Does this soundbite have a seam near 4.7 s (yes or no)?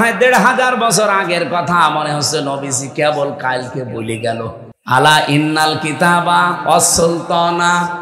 yes